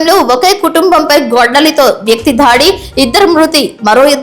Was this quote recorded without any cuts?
yes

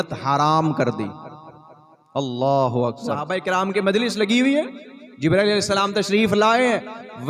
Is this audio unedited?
no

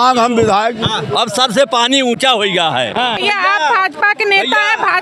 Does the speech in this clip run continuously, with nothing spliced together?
no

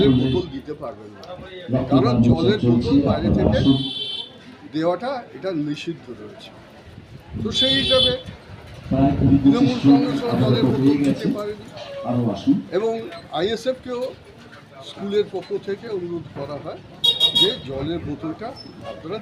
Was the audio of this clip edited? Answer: no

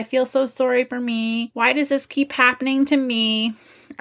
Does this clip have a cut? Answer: yes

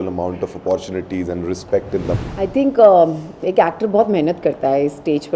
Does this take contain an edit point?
yes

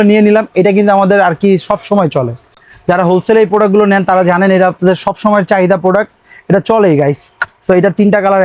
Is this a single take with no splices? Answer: yes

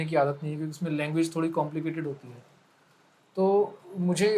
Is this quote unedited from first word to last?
yes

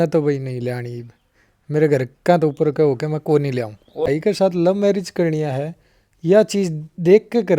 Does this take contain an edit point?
yes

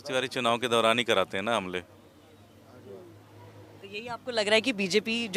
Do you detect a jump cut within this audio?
no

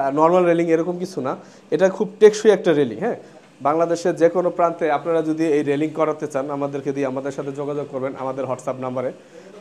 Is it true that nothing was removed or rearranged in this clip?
yes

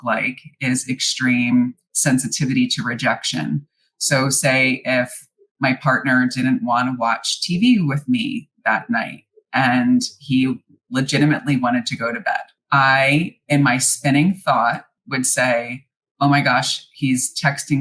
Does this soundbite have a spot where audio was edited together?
yes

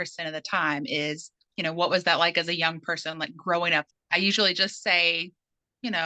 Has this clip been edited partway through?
yes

